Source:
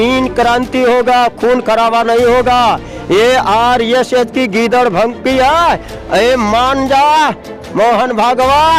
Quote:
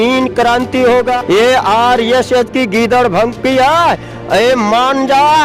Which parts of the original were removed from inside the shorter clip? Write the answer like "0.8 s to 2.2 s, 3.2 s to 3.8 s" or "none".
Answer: 1.1 s to 2.9 s